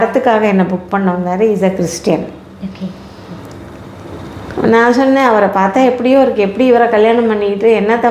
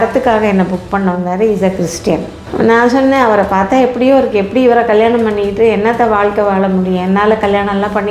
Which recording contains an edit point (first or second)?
second